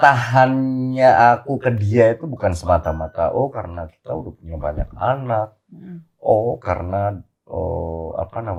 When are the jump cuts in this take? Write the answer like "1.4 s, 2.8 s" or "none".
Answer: none